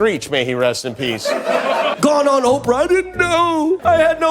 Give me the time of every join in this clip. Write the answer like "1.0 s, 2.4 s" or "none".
1.9 s